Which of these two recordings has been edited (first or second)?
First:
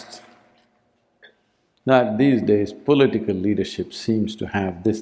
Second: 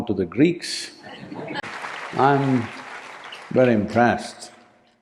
second